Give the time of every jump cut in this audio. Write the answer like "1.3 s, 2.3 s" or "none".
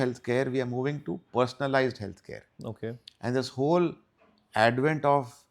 none